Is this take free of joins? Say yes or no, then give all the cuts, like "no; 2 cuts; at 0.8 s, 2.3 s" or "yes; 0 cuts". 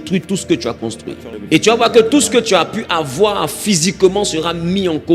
no; 1 cut; at 1.3 s